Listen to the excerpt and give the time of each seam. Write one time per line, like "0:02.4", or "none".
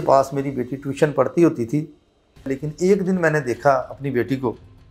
0:02.5